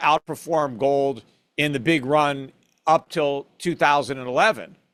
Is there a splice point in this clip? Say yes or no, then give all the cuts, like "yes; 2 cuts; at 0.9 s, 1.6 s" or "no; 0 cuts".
no; 0 cuts